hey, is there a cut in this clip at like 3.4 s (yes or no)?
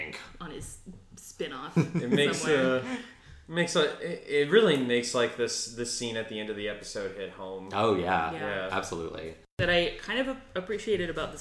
no